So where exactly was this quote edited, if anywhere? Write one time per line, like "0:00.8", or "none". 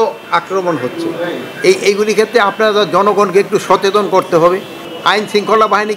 0:04.9